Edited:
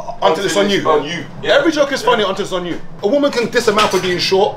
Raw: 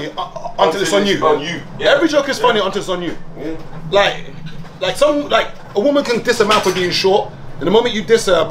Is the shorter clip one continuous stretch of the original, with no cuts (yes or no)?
no